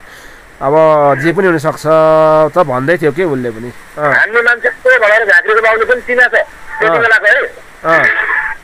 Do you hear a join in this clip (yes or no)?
yes